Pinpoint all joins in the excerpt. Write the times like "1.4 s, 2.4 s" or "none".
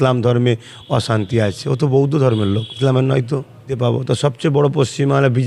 2.7 s, 3.7 s